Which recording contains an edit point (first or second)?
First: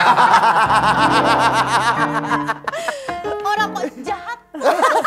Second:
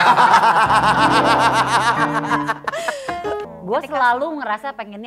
second